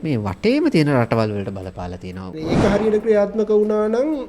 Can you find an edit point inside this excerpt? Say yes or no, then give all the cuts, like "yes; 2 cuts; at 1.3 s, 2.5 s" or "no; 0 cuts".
yes; 1 cut; at 2.3 s